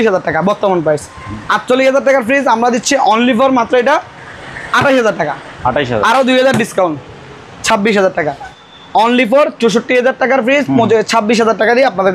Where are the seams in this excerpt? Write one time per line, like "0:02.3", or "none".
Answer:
0:08.6